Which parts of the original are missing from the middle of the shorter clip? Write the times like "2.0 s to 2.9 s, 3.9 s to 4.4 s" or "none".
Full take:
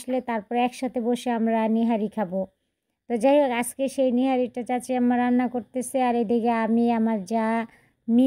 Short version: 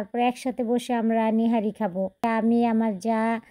2.6 s to 6.5 s